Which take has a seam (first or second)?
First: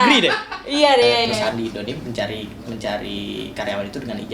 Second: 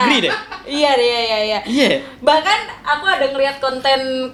first